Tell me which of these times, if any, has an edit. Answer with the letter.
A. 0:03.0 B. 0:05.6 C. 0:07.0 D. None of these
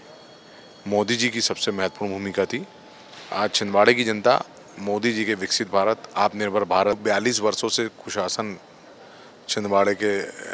C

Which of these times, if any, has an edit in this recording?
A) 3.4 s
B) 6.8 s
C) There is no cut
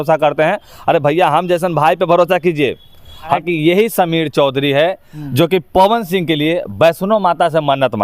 A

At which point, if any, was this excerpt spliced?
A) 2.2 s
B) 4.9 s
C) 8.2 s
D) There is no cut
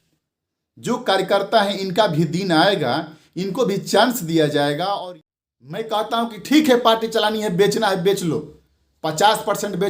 B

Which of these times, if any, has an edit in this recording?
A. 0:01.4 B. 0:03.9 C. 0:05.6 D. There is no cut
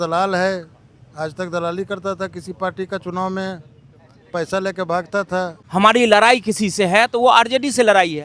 C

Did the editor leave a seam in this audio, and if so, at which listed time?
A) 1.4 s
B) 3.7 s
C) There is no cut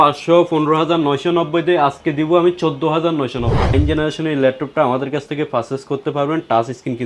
B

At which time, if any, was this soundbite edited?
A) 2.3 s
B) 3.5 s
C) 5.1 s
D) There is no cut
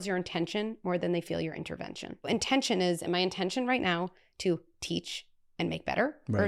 A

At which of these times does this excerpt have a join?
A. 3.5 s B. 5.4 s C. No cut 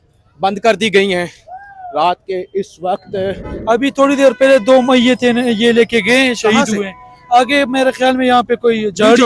A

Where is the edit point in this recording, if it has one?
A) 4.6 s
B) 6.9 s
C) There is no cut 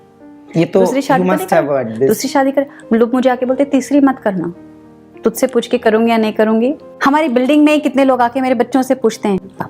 B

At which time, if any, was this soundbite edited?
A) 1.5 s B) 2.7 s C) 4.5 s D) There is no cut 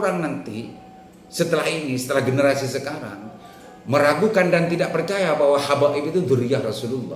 D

